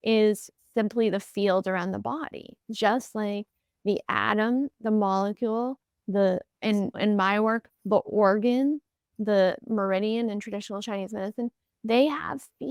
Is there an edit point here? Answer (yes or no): no